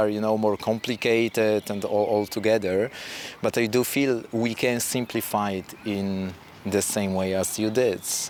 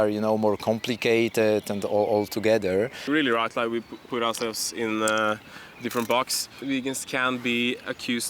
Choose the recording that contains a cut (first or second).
second